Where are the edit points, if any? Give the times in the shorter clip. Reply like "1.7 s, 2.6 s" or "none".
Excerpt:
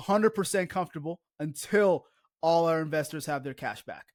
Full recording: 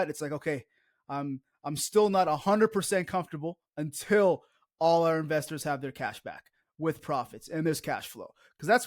none

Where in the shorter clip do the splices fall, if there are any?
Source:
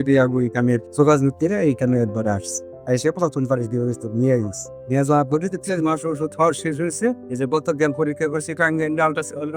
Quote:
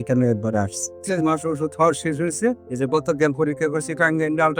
1.0 s

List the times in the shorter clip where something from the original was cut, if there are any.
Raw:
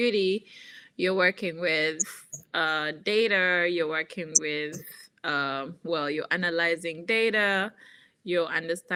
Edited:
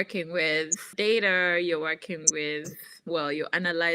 0.8 s, 3.0 s

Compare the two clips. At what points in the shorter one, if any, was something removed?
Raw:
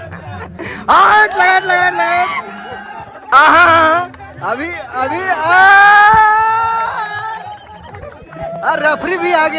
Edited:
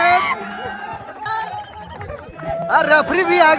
1.1 s

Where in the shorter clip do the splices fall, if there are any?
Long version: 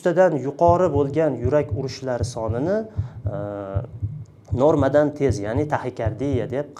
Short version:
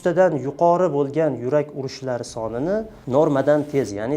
3.0 s

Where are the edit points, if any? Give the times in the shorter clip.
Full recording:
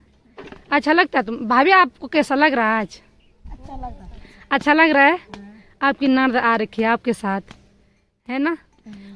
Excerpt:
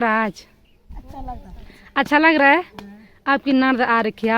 none

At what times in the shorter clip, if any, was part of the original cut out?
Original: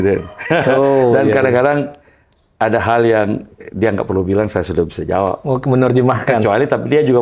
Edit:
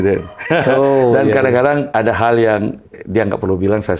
1.9 s

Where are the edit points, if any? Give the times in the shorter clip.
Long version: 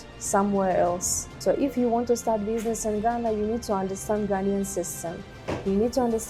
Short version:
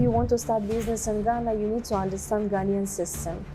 none

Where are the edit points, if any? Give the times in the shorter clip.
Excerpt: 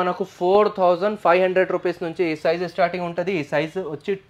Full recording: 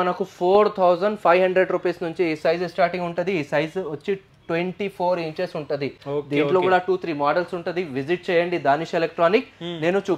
none

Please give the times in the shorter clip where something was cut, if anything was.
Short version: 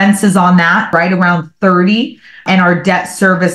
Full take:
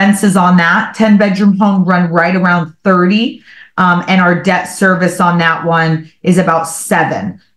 0.9 s, 2.4 s

